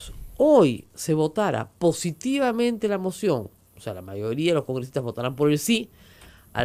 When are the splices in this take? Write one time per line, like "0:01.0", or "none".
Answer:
none